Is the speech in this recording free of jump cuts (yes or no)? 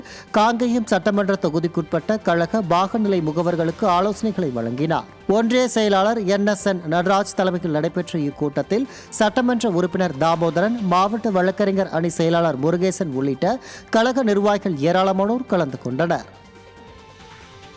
no